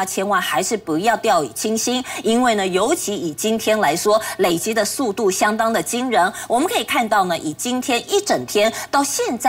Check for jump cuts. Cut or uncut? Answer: uncut